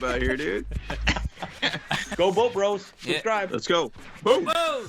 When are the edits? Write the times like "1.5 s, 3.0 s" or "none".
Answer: 2.1 s